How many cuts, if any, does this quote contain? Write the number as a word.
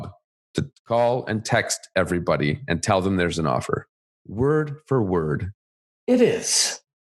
zero